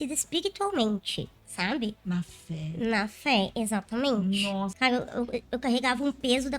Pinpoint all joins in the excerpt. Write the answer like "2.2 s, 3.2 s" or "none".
4.7 s